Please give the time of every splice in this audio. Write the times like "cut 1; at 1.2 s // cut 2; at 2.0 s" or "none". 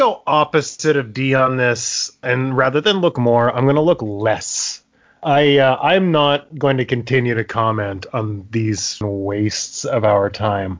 cut 1; at 2.2 s // cut 2; at 9.0 s